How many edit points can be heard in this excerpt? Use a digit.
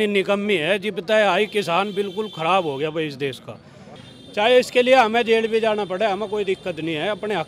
1